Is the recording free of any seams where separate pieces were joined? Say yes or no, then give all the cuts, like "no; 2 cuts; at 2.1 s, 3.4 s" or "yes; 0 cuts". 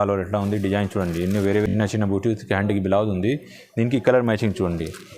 no; 1 cut; at 1.6 s